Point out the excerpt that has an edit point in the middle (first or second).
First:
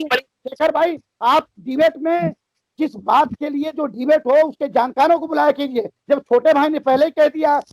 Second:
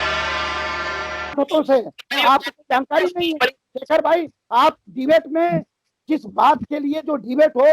second